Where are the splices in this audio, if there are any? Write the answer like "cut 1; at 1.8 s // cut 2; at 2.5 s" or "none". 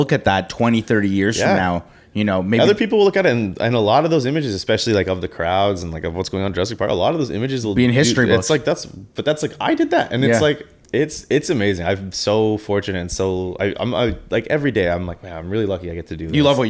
cut 1; at 10.8 s